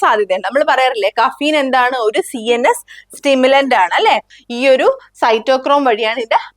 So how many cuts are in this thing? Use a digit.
1